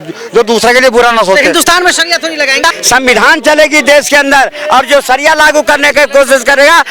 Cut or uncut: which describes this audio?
cut